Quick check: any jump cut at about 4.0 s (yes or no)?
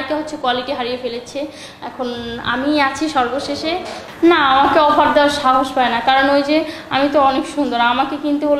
yes